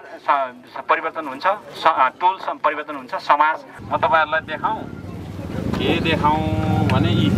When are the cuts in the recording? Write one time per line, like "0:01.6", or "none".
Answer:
0:03.7